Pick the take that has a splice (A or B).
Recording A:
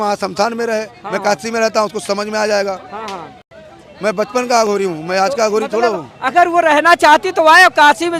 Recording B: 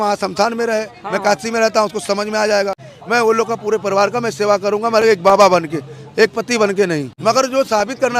B